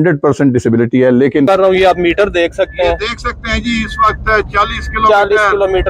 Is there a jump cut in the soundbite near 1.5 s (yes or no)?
yes